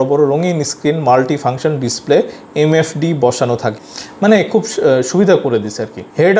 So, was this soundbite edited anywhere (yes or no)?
yes